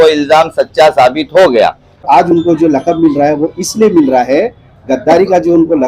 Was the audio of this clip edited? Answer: yes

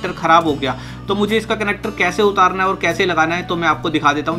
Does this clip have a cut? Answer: no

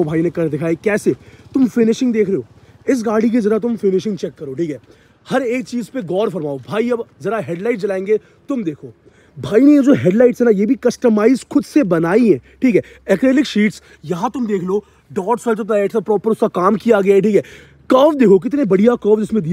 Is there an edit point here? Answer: no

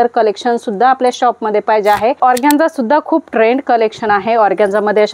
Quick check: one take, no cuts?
no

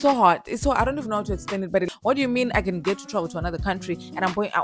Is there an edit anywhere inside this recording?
yes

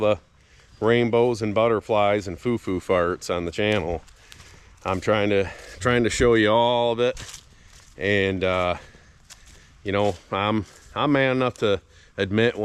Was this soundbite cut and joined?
no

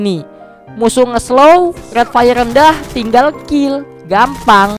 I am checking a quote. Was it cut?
no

